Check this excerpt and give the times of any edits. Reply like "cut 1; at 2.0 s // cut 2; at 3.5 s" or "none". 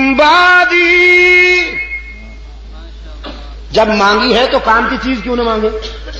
none